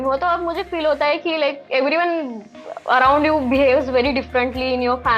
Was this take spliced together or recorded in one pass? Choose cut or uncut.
uncut